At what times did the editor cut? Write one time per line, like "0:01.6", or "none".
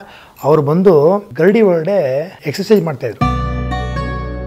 0:01.3
0:02.4
0:03.2